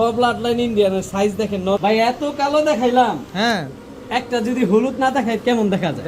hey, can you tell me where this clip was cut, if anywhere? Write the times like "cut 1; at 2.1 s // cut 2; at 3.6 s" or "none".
cut 1; at 1.8 s

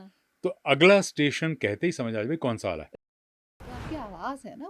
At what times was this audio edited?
cut 1; at 3.2 s

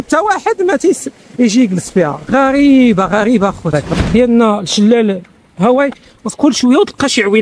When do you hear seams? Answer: cut 1; at 3.7 s

